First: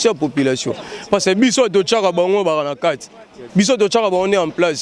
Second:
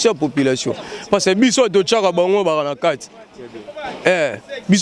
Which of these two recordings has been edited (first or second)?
first